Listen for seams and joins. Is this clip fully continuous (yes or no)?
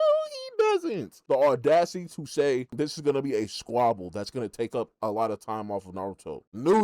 no